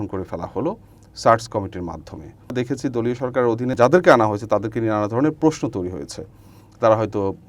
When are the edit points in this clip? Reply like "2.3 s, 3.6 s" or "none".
2.5 s, 3.7 s